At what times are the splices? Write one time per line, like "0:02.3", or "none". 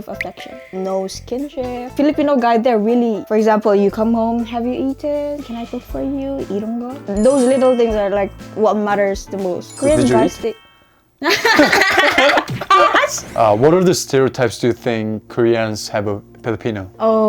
0:00.7
0:01.9
0:03.2
0:07.0
0:09.7
0:13.3